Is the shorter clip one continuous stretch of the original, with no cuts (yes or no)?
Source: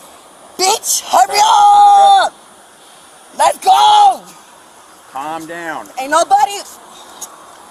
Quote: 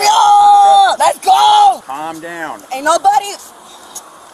no